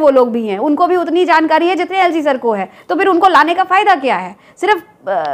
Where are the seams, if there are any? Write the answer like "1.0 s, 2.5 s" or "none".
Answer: none